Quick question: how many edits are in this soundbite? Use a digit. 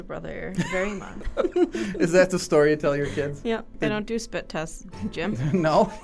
2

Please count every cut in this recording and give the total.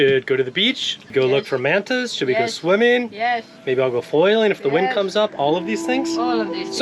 1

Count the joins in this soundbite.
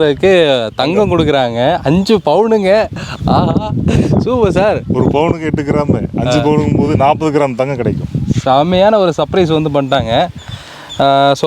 0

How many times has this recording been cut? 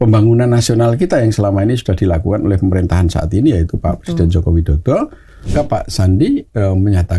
1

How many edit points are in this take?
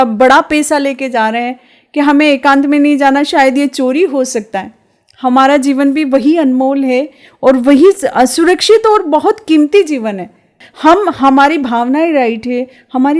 1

